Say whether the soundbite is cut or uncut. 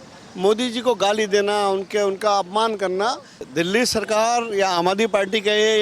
cut